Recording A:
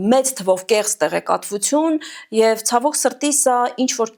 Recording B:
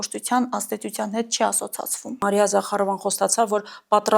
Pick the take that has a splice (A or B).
B